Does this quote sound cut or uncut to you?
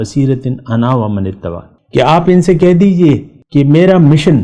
cut